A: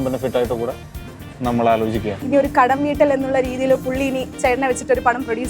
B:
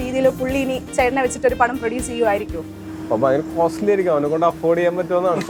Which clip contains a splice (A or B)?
A